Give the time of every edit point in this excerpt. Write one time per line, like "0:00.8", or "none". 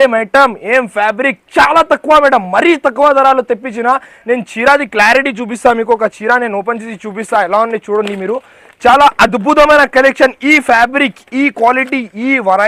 none